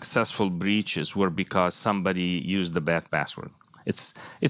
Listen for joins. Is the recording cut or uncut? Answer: uncut